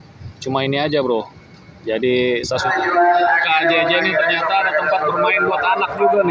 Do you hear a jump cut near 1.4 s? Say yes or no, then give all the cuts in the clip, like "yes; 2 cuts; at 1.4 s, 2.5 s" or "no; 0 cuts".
no; 1 cut; at 2.6 s